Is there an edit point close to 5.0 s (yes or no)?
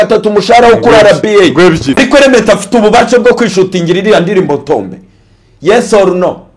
no